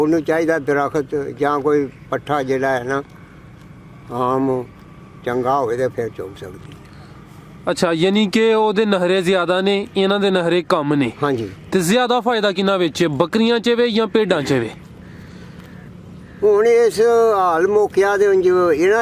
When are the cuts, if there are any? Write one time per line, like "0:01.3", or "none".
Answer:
none